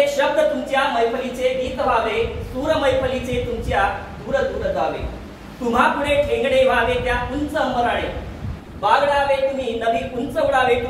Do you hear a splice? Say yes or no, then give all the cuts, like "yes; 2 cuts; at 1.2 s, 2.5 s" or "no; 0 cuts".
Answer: no; 0 cuts